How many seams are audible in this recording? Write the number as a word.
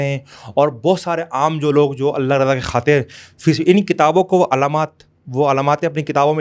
zero